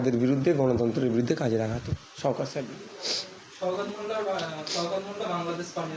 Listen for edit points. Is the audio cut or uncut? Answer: uncut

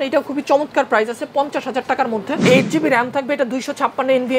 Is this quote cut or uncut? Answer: cut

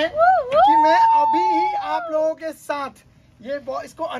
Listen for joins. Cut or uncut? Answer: uncut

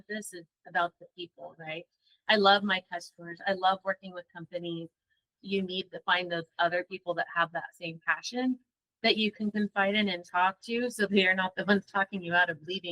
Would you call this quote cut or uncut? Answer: cut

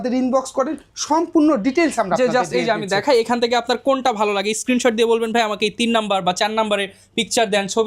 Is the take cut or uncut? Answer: uncut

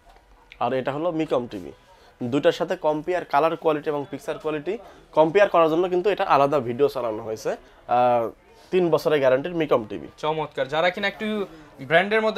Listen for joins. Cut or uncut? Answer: cut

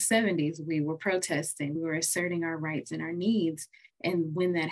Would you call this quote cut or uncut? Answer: cut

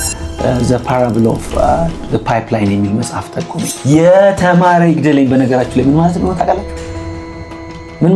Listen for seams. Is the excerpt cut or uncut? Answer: cut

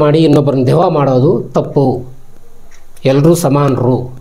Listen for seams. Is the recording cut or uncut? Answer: uncut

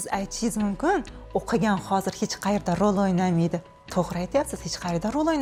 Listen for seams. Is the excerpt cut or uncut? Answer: uncut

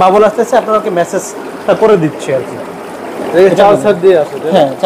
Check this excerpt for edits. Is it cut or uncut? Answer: uncut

